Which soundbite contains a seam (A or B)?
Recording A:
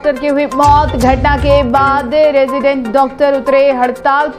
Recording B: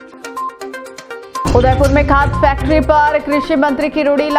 B